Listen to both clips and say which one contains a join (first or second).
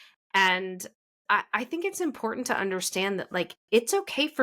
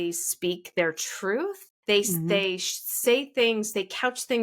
second